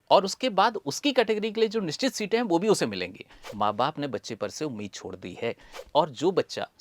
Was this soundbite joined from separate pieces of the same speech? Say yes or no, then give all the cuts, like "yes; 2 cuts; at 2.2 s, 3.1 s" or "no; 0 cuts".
yes; 2 cuts; at 3.4 s, 5.7 s